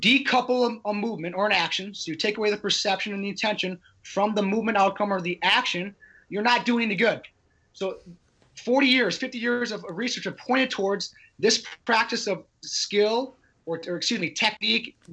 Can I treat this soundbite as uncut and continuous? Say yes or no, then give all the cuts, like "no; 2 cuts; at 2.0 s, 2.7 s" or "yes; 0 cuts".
yes; 0 cuts